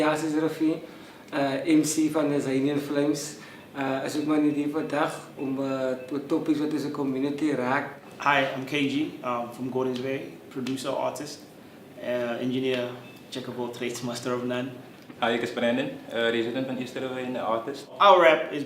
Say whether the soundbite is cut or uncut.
cut